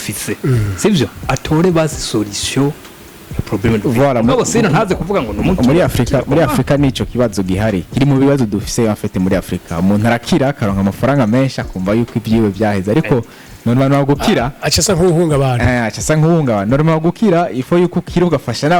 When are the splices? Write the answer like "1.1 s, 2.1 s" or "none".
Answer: none